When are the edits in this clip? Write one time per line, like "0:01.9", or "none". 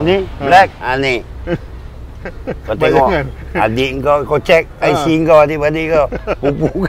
none